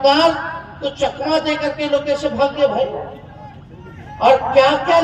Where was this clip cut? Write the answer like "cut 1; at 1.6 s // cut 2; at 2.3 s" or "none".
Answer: none